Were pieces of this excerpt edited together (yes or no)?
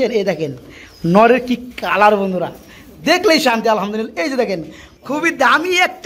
yes